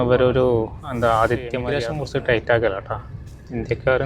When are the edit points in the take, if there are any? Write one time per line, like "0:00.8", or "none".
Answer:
0:01.7